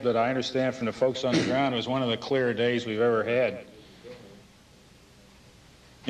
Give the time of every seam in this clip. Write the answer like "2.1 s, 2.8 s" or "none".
3.9 s